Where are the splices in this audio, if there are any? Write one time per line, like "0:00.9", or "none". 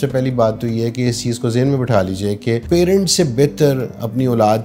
0:02.6